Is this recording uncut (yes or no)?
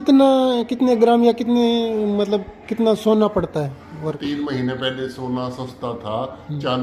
no